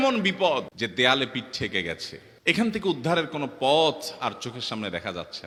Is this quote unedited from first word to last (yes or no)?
yes